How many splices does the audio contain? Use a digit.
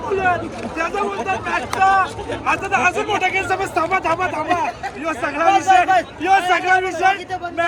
0